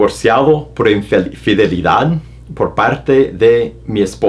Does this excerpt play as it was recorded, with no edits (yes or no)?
yes